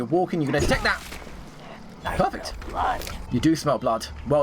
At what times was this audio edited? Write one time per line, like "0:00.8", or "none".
0:03.1